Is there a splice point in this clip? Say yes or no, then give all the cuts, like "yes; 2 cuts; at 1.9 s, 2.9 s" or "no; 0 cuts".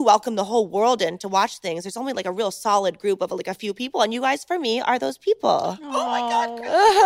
no; 0 cuts